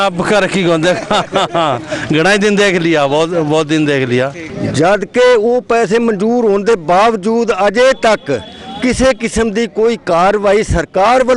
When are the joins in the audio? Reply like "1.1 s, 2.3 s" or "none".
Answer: 4.5 s